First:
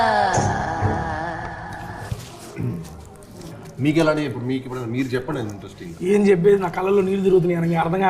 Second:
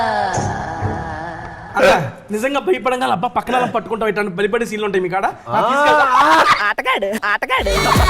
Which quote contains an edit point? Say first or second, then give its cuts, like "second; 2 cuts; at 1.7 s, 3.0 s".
second; 1 cut; at 1.6 s